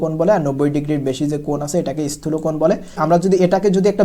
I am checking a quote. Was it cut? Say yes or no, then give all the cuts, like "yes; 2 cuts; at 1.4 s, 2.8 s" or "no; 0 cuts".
yes; 1 cut; at 3.0 s